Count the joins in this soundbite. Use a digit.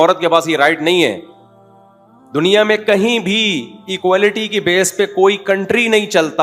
0